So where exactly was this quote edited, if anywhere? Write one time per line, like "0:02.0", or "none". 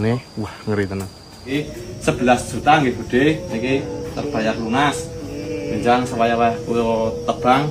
0:01.5